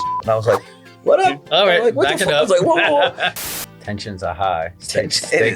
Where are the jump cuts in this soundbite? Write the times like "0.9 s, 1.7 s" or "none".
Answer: 3.3 s